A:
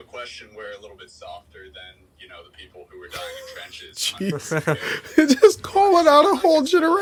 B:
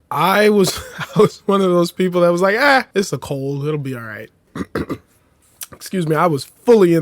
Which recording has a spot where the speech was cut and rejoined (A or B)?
B